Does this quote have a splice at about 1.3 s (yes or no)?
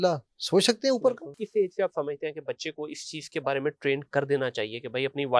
yes